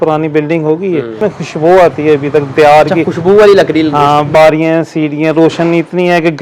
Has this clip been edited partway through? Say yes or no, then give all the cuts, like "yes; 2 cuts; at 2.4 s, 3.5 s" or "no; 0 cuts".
yes; 2 cuts; at 1.2 s, 4.3 s